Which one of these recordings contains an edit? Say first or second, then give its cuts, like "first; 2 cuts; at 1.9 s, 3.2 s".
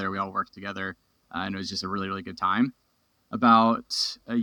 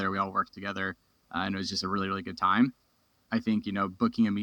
second; 1 cut; at 3.2 s